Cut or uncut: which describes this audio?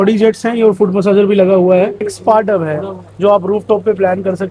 cut